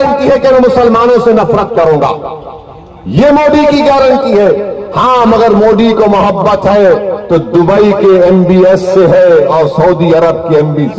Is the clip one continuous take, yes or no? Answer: no